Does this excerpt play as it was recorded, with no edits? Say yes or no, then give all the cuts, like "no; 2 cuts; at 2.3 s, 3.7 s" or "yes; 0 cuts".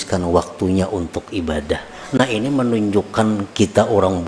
no; 1 cut; at 2.0 s